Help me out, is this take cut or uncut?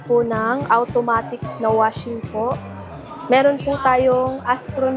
uncut